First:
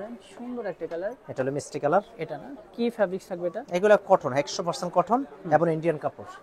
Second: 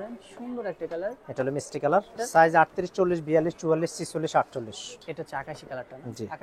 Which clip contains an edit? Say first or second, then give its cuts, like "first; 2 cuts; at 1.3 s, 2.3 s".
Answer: second; 2 cuts; at 2.2 s, 5.0 s